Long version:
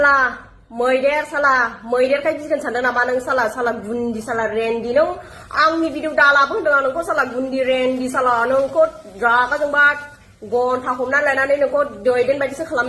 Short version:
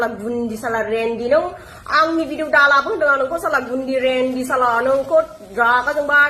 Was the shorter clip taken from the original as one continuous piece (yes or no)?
yes